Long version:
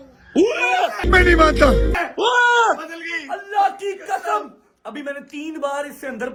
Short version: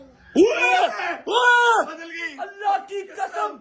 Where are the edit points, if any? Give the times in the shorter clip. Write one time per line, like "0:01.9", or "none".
0:01.0